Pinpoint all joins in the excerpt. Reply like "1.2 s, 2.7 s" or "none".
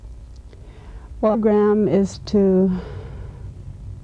none